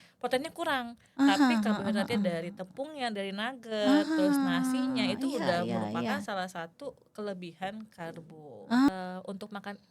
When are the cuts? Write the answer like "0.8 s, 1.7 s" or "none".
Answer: 8.9 s